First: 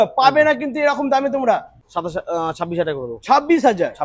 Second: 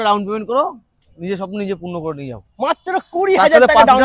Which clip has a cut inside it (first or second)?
first